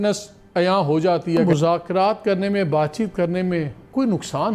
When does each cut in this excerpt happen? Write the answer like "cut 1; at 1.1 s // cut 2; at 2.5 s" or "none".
cut 1; at 1.4 s